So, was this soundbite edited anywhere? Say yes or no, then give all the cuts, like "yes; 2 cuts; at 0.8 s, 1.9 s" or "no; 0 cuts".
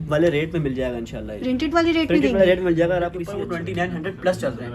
yes; 1 cut; at 3.2 s